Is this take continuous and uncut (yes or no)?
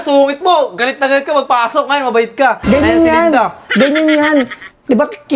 yes